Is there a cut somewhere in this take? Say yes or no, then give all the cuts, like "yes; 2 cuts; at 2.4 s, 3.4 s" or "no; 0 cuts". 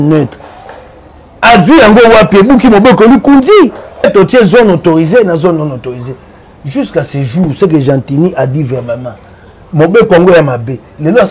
yes; 1 cut; at 4.1 s